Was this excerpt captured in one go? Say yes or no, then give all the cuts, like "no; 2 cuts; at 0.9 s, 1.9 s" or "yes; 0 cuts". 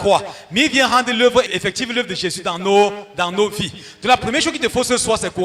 no; 1 cut; at 1.5 s